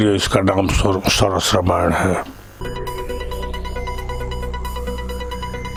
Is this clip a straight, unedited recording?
yes; 0 cuts

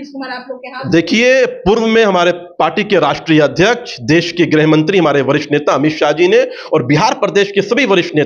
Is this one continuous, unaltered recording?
yes; 0 cuts

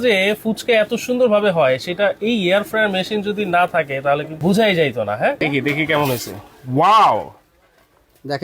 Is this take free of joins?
no; 2 cuts; at 4.3 s, 5.4 s

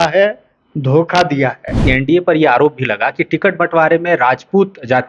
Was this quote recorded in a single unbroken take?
no; 1 cut; at 1.8 s

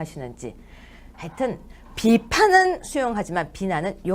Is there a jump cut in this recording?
no; 0 cuts

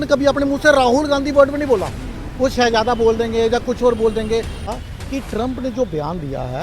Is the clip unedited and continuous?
no; 1 cut; at 4.6 s

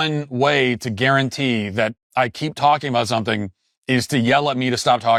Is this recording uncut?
yes; 0 cuts

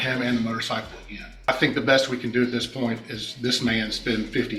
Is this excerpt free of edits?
no; 1 cut; at 1.5 s

